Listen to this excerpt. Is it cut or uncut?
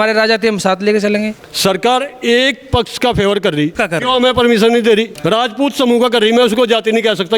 cut